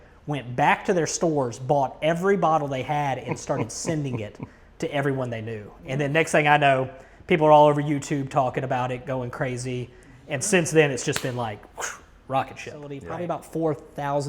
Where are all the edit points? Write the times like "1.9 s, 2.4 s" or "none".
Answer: 13.0 s